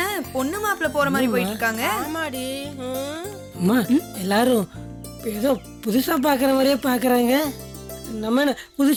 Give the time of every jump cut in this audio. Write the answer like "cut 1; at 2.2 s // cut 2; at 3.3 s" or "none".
none